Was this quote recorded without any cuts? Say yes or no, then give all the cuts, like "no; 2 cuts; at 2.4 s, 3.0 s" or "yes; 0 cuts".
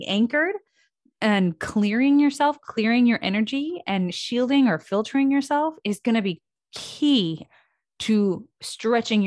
yes; 0 cuts